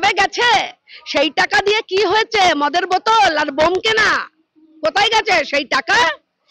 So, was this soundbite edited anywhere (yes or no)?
no